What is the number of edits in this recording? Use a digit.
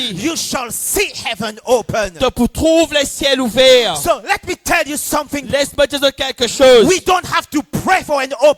0